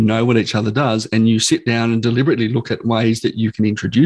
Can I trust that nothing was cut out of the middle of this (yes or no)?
yes